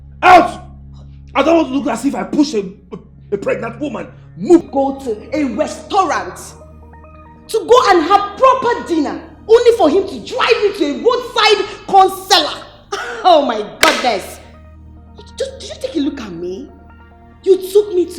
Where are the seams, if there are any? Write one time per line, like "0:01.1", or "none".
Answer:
0:04.7